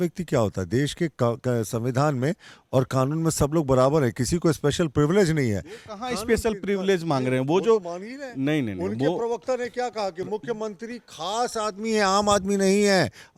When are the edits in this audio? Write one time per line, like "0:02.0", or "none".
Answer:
none